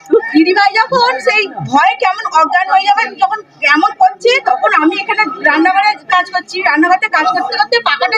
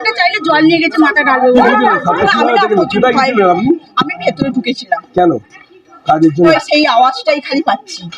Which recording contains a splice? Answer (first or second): second